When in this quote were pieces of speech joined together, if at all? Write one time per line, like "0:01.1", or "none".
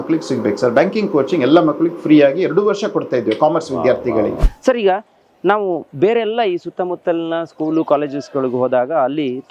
0:04.4